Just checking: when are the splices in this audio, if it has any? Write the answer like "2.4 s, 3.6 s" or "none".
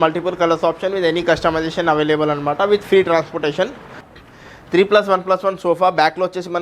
4.0 s